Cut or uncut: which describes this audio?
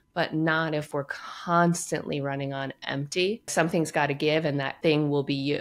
cut